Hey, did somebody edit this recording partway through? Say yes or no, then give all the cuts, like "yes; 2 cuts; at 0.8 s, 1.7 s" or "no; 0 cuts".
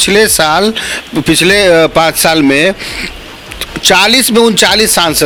no; 0 cuts